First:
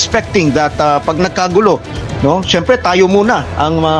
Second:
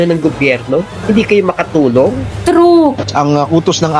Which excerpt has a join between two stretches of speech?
second; 1 cut; at 3.0 s

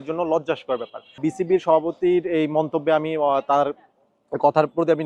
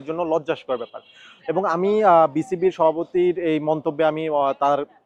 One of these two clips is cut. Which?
first; 1 cut; at 1.2 s

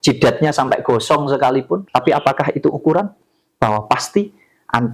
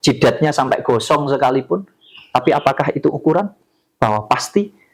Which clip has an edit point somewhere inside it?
first; 1 cut; at 1.8 s

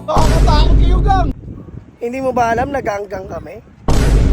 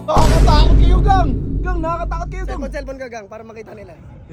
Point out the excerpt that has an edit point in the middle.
first; 1 cut; at 1.4 s

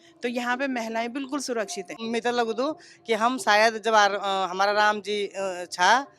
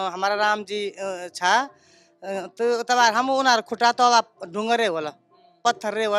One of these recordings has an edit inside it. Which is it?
first; 1 cut; at 2.0 s

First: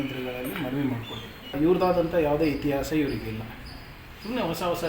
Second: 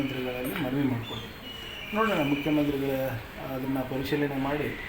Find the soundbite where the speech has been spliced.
first; 1 cut; at 1.5 s

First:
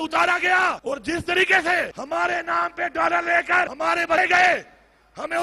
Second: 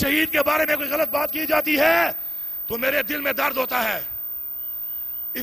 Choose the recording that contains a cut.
first; 3 cuts; at 0.8 s, 2.0 s, 3.7 s

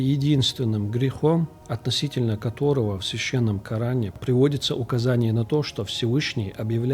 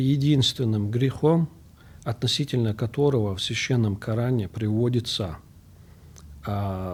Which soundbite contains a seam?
first; 2 cuts; at 1.6 s, 4.2 s

